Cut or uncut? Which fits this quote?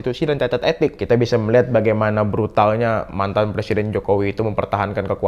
cut